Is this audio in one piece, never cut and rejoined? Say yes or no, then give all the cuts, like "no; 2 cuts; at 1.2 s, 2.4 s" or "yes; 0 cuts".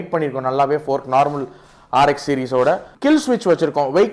no; 1 cut; at 2.9 s